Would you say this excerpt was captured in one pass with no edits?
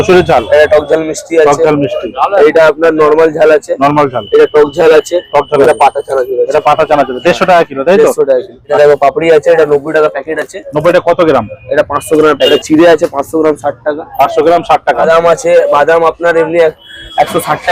no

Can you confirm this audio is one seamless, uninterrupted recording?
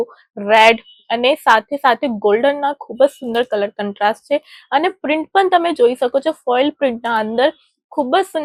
yes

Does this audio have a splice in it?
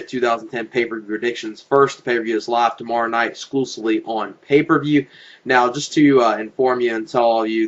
yes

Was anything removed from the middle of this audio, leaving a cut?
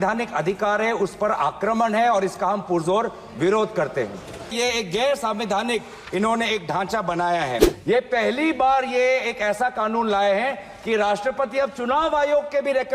yes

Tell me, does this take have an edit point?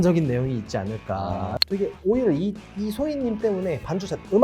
yes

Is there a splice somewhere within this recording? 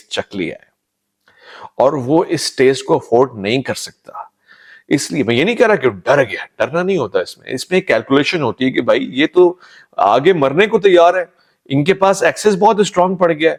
no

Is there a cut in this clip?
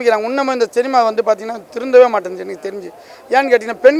no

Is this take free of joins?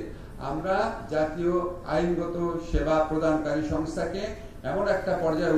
yes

